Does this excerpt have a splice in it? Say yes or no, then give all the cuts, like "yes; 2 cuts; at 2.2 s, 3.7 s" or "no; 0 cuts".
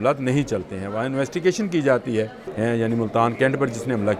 yes; 1 cut; at 2.4 s